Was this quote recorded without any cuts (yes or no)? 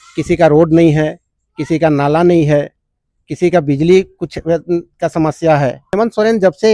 no